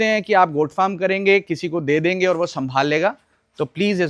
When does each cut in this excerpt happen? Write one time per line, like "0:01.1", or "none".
none